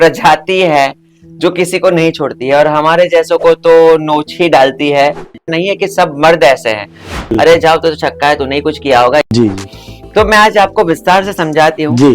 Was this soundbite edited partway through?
yes; 3 cuts; at 5.4 s, 7.3 s, 9.3 s

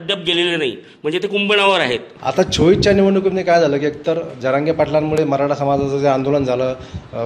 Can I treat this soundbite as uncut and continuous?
no; 1 cut; at 2.1 s

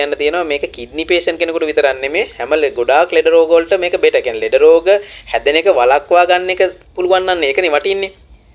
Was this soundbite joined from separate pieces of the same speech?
no; 0 cuts

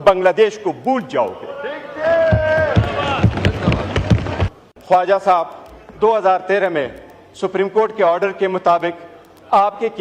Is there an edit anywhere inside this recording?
yes; 1 cut; at 4.6 s

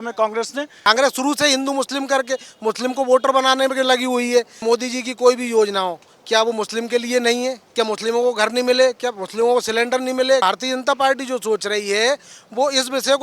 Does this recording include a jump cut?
yes; 4 cuts; at 0.9 s, 4.6 s, 7.6 s, 10.4 s

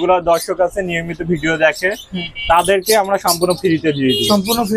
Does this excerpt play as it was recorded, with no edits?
yes; 0 cuts

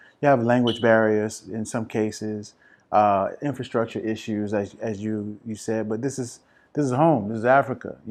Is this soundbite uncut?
yes; 0 cuts

